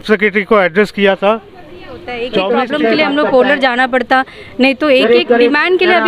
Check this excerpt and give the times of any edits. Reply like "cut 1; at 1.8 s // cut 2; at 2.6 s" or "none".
cut 1; at 2.4 s